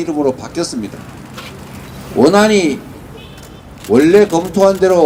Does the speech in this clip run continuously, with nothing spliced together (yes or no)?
yes